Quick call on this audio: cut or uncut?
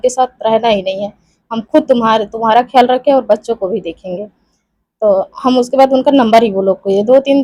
uncut